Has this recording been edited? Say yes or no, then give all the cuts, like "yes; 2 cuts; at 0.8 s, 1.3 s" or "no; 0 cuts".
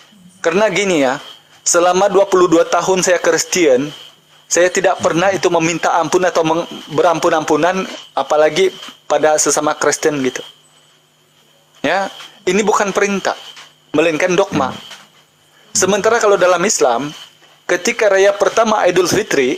no; 0 cuts